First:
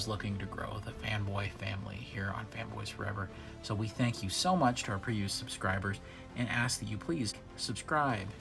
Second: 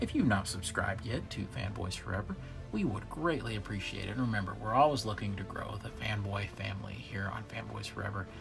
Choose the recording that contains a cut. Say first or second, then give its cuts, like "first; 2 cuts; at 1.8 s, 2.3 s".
first; 1 cut; at 7.4 s